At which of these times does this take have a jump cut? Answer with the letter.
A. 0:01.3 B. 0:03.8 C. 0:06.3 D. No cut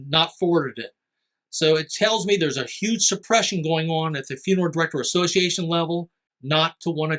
C